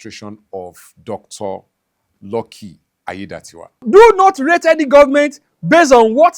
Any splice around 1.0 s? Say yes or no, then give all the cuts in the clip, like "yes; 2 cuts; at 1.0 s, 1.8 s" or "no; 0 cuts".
no; 1 cut; at 3.8 s